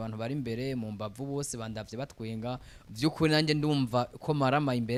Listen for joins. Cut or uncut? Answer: uncut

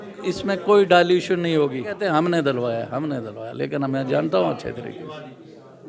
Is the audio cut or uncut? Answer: cut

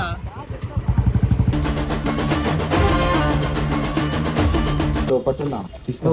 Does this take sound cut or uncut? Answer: cut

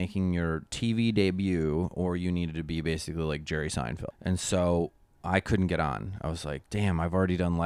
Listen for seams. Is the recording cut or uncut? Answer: cut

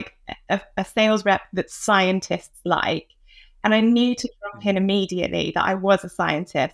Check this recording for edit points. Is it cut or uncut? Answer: uncut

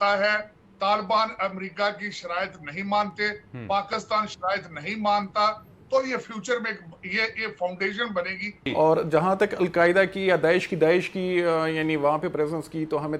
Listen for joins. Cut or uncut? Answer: cut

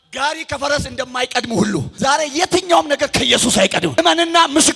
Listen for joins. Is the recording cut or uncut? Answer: cut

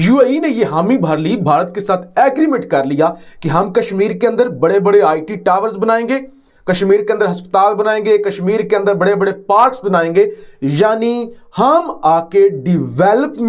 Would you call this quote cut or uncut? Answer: uncut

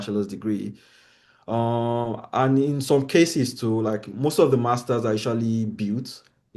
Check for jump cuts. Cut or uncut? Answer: uncut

